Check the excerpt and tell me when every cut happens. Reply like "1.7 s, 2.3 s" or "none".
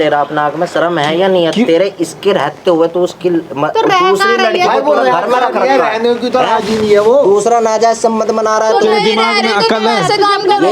none

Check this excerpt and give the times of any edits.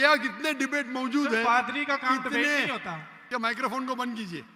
3.1 s

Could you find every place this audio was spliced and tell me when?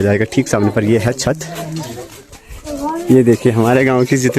2.3 s

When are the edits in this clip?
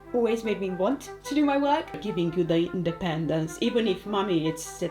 2.0 s

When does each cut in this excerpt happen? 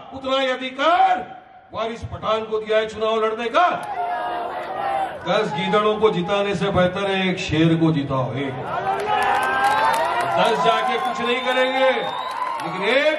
3.9 s

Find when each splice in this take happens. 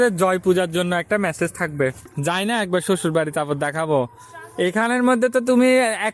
2.1 s

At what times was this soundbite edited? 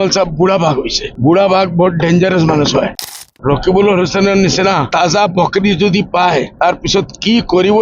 1.0 s, 3.3 s, 4.9 s, 6.5 s

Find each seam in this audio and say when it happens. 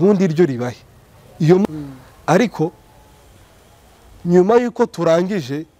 1.6 s

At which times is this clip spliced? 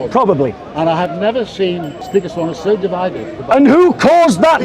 1.9 s, 3.4 s

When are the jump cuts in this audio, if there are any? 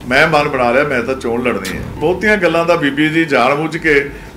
1.9 s

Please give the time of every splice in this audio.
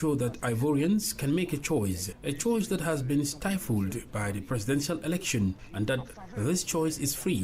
2.1 s, 5.6 s

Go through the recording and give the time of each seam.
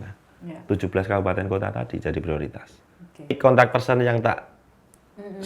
3.4 s

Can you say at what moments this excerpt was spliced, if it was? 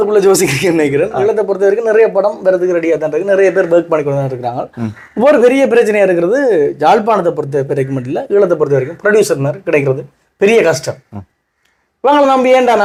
none

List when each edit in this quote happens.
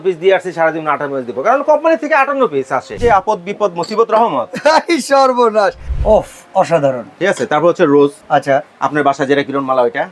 3.0 s, 5.8 s, 8.2 s

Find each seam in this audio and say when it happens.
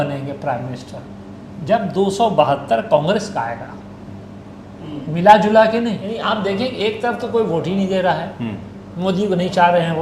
6.1 s

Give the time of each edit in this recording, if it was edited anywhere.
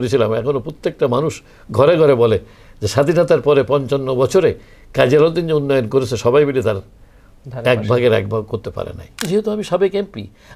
9.2 s

